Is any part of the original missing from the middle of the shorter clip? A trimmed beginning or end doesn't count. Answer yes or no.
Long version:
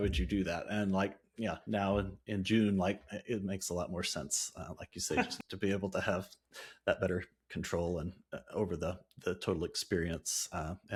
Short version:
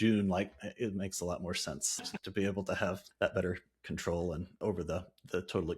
yes